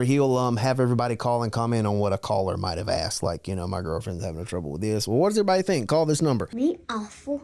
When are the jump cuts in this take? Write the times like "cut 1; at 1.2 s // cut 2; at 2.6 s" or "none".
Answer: cut 1; at 6.5 s